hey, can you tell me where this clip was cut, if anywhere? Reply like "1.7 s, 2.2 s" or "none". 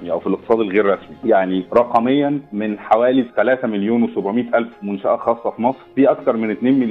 1.4 s, 2.5 s, 5.8 s